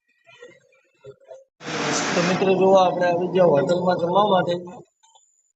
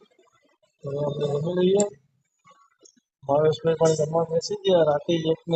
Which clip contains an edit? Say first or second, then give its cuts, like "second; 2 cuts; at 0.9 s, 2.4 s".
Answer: first; 1 cut; at 1.5 s